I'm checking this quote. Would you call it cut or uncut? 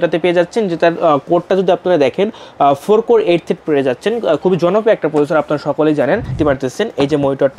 cut